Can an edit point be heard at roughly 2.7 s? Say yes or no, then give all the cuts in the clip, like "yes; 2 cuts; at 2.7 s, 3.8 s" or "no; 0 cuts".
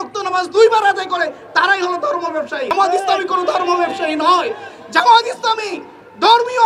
yes; 1 cut; at 2.7 s